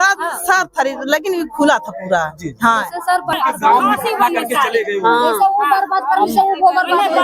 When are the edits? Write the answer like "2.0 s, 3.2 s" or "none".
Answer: 3.4 s